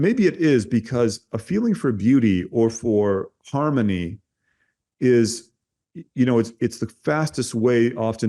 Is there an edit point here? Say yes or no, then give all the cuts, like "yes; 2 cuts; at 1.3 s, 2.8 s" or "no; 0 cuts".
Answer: no; 0 cuts